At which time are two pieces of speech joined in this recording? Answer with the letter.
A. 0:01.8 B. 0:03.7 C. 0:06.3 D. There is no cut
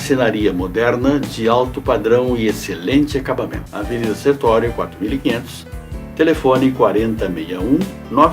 B